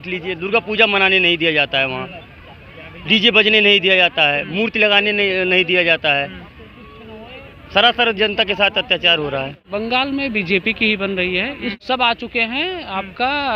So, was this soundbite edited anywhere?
yes; 2 cuts; at 9.6 s, 11.7 s

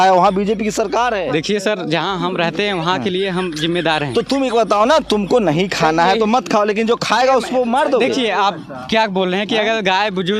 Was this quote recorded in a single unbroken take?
no; 1 cut; at 1.3 s

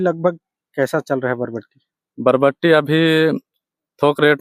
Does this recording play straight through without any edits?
yes; 0 cuts

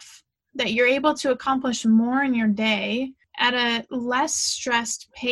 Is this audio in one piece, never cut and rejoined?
no; 1 cut; at 3.2 s

